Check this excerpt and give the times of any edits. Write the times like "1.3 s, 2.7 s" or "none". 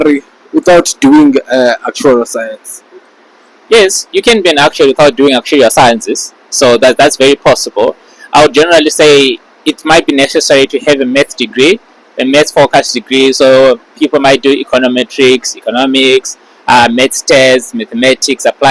none